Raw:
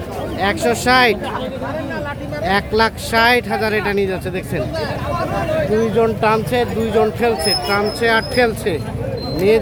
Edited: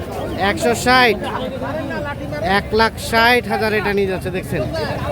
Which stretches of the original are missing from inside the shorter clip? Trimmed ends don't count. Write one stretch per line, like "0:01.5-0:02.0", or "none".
none